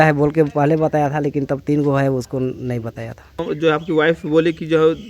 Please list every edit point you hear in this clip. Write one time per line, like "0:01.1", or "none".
none